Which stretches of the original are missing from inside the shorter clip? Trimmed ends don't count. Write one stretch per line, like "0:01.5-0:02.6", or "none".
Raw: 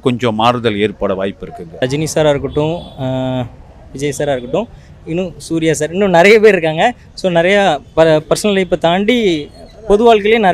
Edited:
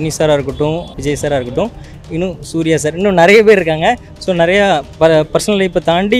0:02.9-0:03.9